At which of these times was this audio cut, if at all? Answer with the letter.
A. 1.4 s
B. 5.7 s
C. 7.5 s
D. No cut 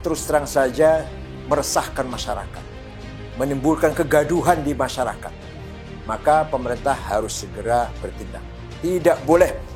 B